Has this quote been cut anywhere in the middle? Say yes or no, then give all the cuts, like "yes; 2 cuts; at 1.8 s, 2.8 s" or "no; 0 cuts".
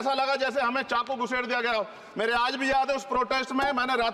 no; 0 cuts